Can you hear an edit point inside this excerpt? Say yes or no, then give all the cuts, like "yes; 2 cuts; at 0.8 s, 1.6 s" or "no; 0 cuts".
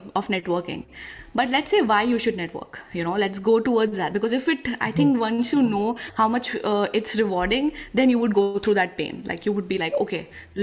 no; 0 cuts